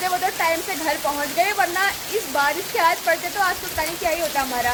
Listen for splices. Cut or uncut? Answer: uncut